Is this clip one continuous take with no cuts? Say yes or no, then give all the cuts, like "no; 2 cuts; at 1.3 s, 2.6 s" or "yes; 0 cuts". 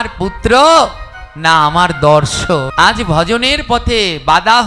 no; 1 cut; at 2.7 s